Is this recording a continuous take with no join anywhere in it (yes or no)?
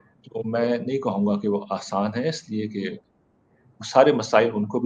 yes